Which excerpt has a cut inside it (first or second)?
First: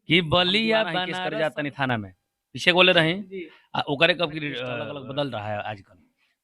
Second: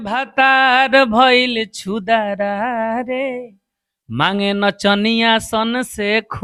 first